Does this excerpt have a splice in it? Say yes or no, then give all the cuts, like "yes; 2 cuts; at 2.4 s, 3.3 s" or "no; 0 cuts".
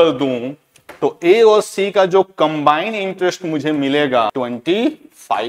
yes; 1 cut; at 4.3 s